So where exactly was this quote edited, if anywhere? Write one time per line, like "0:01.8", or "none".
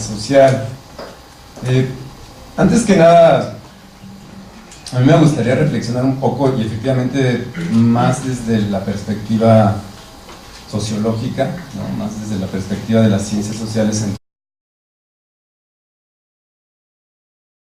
none